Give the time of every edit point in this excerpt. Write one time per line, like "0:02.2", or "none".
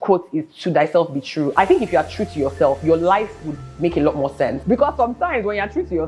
0:04.6